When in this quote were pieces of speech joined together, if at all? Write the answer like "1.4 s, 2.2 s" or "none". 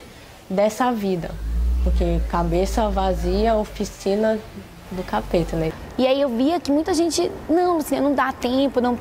5.8 s